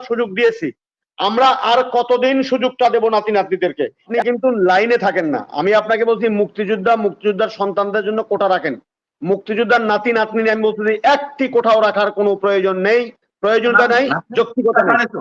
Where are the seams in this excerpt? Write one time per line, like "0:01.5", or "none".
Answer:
0:04.1